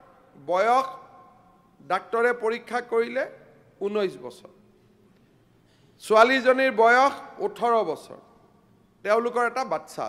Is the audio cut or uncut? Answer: uncut